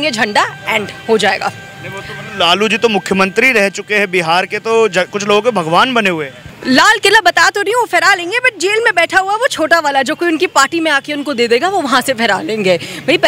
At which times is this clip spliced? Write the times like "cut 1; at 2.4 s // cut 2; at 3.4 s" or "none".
none